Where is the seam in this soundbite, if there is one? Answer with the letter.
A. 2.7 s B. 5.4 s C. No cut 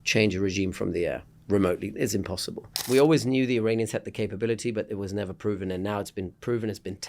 A